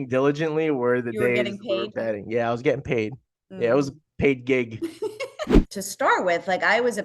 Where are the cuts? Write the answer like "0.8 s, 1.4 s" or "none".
5.4 s